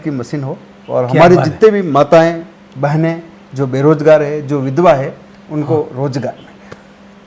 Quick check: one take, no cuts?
yes; 0 cuts

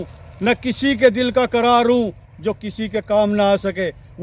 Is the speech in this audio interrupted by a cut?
no; 0 cuts

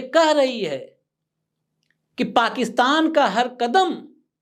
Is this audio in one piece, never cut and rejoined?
yes; 0 cuts

